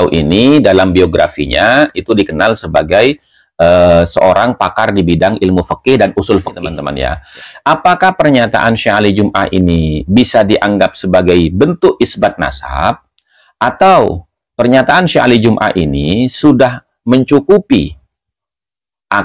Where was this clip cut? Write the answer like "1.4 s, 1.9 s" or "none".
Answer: 6.9 s